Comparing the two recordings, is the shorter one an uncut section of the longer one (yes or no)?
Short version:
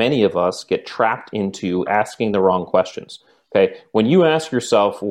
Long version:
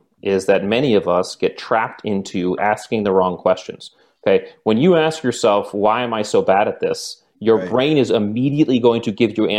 yes